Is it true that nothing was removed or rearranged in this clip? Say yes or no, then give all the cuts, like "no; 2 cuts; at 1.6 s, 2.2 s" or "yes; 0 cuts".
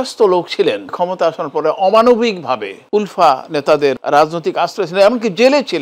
no; 3 cuts; at 0.9 s, 2.7 s, 4.0 s